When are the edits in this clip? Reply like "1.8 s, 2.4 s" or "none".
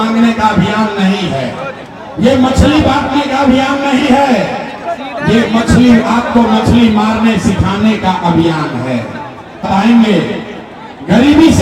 9.7 s

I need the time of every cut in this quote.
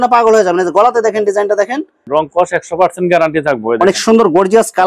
2.0 s

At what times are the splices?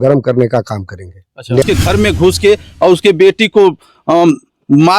1.6 s

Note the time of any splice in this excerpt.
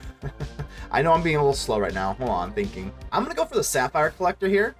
2.9 s

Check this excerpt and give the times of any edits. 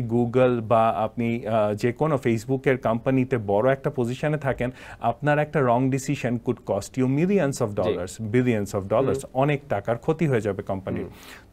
none

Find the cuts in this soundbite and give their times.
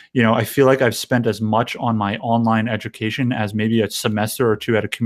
none

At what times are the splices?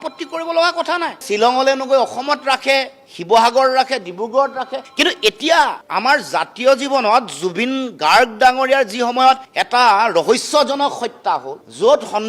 none

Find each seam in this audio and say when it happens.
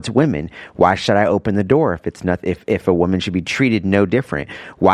3.5 s

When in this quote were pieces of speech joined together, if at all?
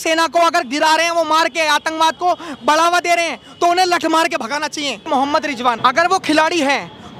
5.4 s

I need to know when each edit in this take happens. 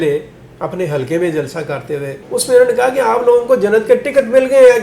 2.1 s

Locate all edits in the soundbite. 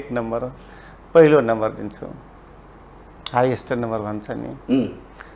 none

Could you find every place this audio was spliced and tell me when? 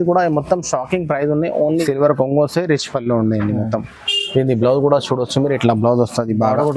1.8 s

